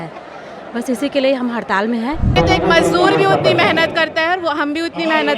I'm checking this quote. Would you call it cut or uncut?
cut